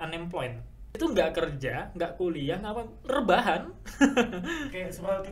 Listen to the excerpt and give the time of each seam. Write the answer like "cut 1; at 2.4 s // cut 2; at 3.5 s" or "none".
cut 1; at 0.9 s